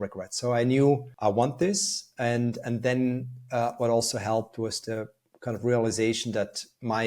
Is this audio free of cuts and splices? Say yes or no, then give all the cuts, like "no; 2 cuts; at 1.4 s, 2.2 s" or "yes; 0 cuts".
no; 1 cut; at 1.1 s